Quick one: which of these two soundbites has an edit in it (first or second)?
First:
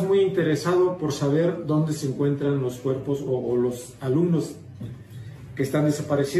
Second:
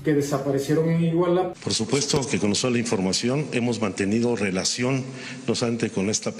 second